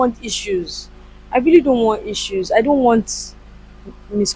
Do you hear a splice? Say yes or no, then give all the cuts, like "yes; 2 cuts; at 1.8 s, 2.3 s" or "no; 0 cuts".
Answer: no; 0 cuts